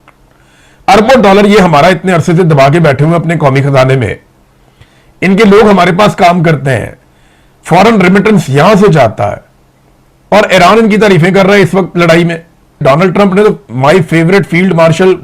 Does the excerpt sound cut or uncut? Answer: cut